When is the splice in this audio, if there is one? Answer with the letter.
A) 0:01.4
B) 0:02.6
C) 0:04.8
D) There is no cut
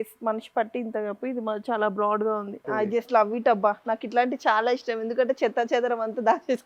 B